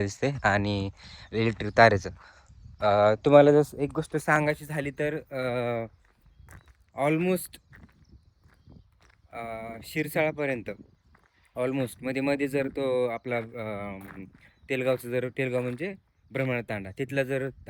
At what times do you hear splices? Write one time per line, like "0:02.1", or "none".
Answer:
none